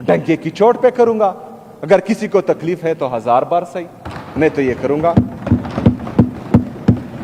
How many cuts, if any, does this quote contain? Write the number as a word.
zero